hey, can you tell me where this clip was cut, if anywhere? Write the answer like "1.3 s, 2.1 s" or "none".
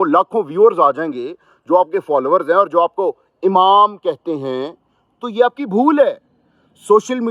none